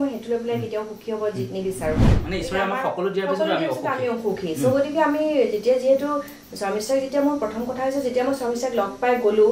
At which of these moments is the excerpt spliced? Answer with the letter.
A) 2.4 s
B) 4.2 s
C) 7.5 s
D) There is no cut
D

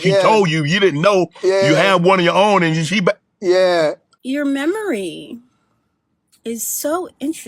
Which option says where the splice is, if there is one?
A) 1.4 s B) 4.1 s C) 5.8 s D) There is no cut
B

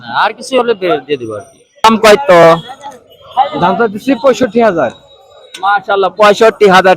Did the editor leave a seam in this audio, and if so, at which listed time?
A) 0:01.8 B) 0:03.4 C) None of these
A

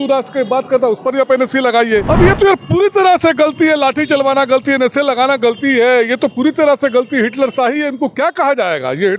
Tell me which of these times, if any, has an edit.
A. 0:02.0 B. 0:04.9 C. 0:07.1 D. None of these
A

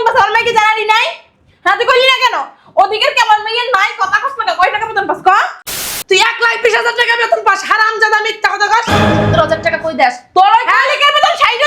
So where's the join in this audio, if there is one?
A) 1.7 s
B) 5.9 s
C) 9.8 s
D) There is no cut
B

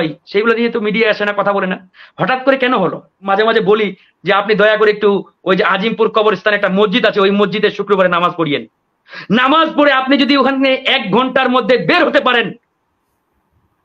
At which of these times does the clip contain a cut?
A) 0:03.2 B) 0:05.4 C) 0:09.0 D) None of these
A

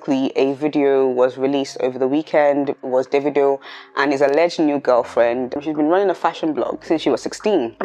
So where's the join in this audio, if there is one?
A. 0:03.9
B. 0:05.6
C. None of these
B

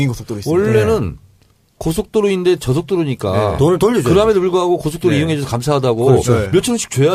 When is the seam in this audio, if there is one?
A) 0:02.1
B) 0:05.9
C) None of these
C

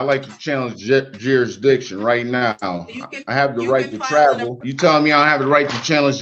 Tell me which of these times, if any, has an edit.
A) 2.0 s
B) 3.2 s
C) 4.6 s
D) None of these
C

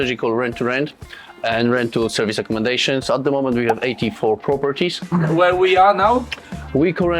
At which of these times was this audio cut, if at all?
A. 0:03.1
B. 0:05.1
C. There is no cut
B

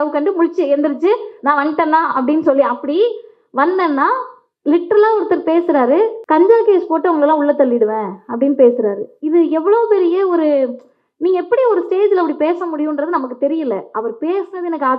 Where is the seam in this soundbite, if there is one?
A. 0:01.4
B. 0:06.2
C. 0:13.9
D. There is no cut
B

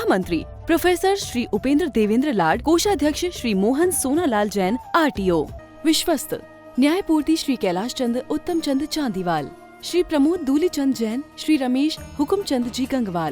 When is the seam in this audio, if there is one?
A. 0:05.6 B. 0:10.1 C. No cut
A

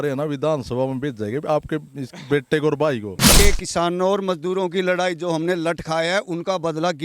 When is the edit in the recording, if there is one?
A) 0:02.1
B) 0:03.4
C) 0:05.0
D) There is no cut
B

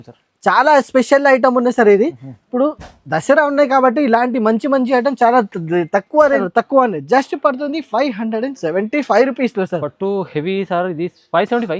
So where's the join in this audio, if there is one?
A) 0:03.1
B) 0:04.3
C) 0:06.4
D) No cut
C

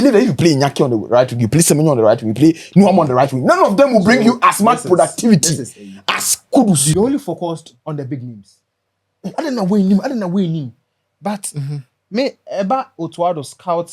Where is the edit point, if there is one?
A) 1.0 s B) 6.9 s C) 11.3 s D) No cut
B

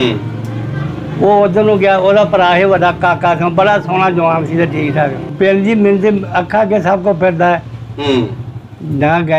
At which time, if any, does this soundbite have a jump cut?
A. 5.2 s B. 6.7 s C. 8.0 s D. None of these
A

